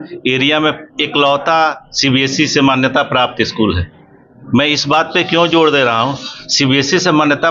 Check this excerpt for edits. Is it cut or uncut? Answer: uncut